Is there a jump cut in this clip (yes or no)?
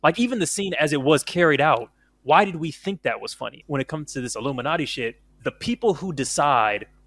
yes